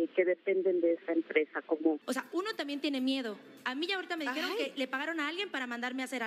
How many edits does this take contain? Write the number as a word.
one